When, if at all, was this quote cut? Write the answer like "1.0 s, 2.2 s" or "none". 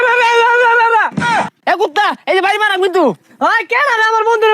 1.6 s